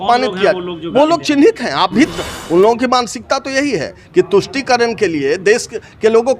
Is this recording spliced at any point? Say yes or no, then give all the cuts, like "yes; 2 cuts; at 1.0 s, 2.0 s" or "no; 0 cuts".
yes; 1 cut; at 2.1 s